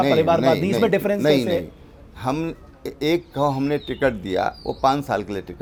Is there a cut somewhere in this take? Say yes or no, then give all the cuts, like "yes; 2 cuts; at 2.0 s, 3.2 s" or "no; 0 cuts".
no; 0 cuts